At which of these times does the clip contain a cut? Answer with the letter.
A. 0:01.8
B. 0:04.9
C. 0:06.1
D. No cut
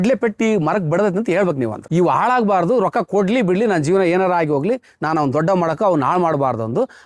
A